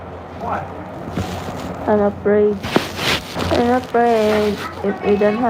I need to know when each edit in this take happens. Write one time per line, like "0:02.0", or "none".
0:03.3

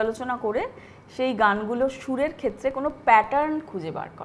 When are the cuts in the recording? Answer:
none

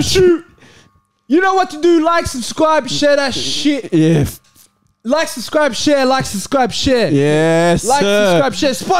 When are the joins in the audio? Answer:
none

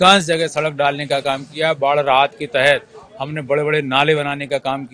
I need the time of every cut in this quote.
none

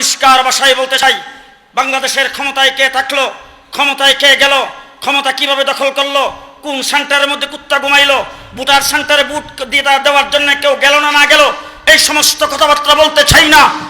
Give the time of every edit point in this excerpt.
0:01.0

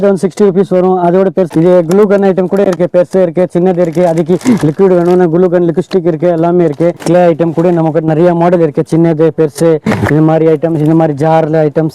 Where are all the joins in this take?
0:01.5
0:07.0

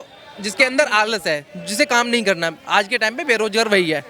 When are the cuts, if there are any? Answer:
none

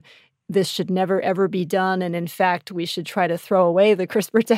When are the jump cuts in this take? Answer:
none

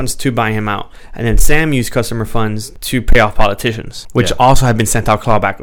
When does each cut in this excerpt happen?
0:02.7
0:03.9

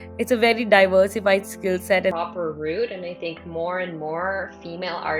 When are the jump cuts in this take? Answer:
0:02.1

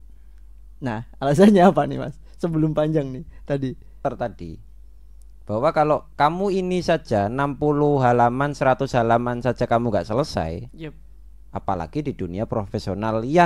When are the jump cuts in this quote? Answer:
0:04.0

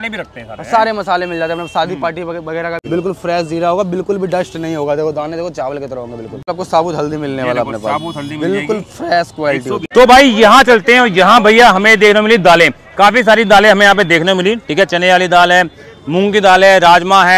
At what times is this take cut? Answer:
0:02.8
0:06.4
0:09.9

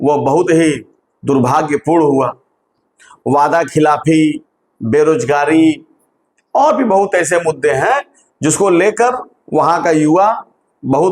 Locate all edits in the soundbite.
0:02.5

